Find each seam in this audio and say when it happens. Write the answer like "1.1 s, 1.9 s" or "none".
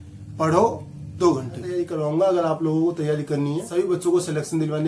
1.9 s, 3.7 s